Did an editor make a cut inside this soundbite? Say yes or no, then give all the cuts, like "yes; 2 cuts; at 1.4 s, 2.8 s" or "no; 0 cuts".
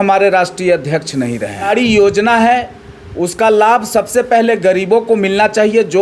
yes; 1 cut; at 1.7 s